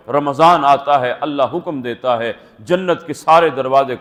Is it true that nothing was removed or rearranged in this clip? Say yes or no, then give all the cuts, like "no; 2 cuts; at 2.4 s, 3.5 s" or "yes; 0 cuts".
yes; 0 cuts